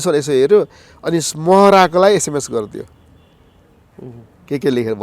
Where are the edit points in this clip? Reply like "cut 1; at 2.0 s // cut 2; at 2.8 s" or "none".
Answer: none